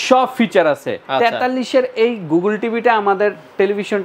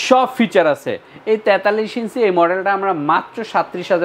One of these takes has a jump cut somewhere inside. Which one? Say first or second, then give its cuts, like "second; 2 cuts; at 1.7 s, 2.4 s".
first; 1 cut; at 1.0 s